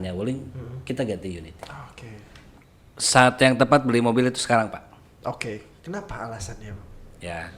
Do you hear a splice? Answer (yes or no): yes